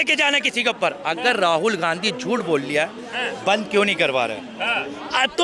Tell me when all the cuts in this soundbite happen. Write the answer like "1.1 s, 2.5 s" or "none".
none